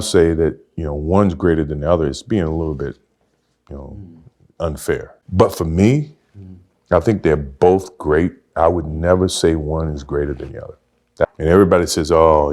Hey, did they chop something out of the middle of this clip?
yes; 2 cuts; at 5.2 s, 11.2 s

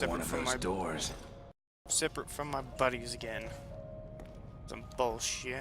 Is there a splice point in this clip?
yes; 1 cut; at 2.7 s

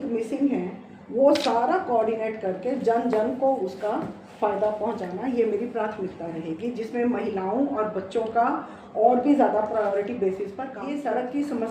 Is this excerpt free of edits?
no; 1 cut; at 10.8 s

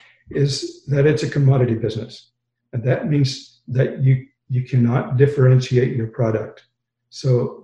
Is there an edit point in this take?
no; 0 cuts

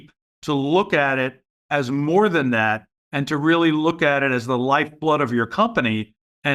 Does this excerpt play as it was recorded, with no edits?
yes; 0 cuts

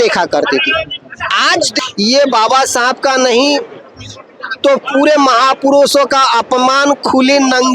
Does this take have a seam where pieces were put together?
yes; 1 cut; at 1.7 s

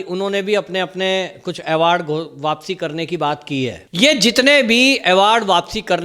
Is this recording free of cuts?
no; 1 cut; at 3.8 s

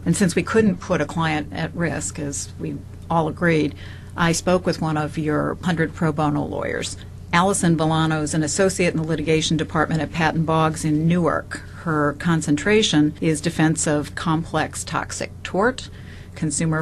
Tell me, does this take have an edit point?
yes; 1 cut; at 1.9 s

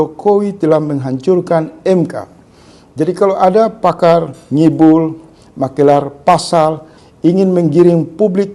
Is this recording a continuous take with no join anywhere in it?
yes; 0 cuts

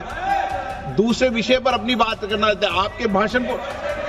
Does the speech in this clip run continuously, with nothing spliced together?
yes; 0 cuts

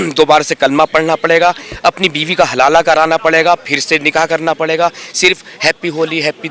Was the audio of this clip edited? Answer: no; 0 cuts

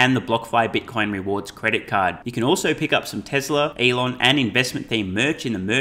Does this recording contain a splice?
yes; 1 cut; at 3.7 s

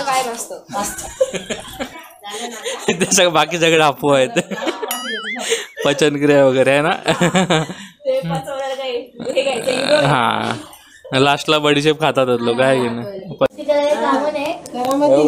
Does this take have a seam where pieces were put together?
yes; 1 cut; at 13.5 s

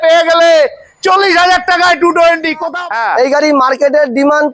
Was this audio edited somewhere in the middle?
yes; 1 cut; at 2.7 s

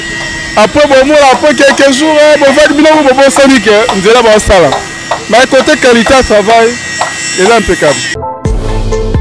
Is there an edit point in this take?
yes; 1 cut; at 8.1 s

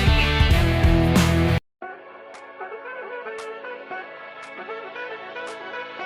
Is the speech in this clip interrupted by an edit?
yes; 1 cut; at 1.7 s

